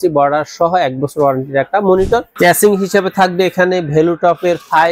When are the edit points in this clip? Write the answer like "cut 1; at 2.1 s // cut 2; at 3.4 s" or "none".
cut 1; at 2.3 s

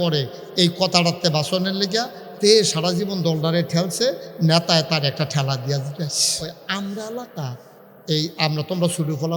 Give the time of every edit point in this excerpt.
cut 1; at 6.7 s

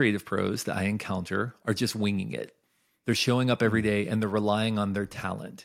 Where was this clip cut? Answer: cut 1; at 1.6 s

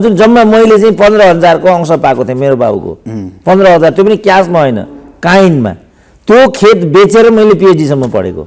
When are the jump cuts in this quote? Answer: none

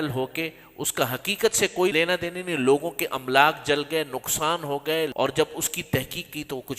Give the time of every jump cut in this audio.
cut 1; at 1.9 s // cut 2; at 5.1 s

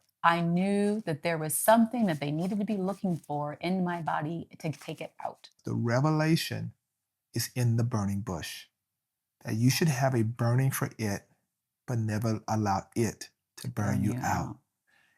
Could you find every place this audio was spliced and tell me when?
cut 1; at 5.6 s

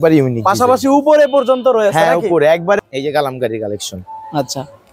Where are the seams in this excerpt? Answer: cut 1; at 2.8 s

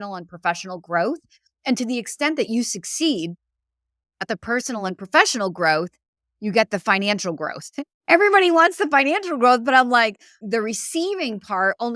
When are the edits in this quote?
cut 1; at 10.3 s

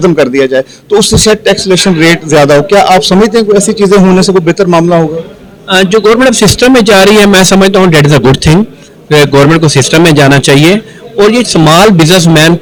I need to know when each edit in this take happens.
none

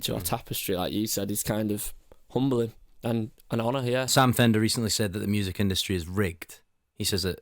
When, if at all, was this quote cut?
cut 1; at 4.1 s

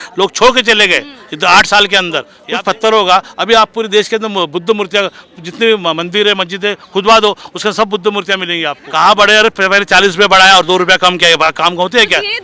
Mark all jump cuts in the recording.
cut 1; at 2.4 s // cut 2; at 8.8 s

